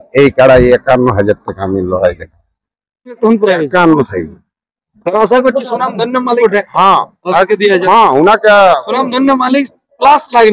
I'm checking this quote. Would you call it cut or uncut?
cut